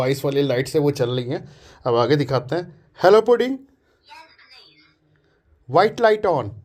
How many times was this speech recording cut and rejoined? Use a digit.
0